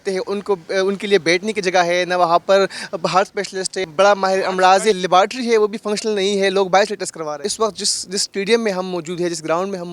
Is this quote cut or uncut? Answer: cut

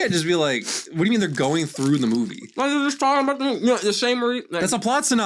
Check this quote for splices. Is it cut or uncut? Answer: uncut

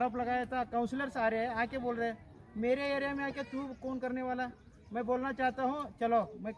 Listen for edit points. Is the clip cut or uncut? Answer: uncut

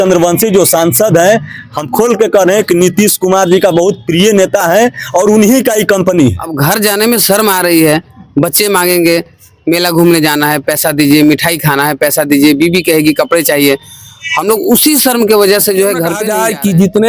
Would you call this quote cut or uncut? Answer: cut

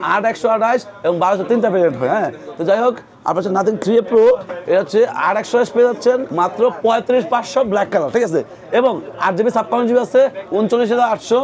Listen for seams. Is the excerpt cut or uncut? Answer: uncut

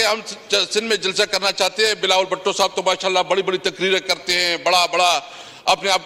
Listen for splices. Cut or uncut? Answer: uncut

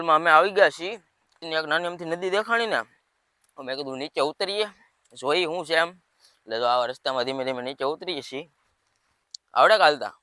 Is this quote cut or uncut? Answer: cut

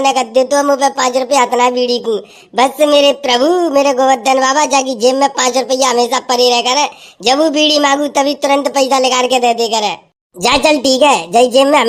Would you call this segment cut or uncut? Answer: uncut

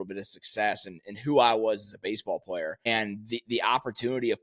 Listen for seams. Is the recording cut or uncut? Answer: cut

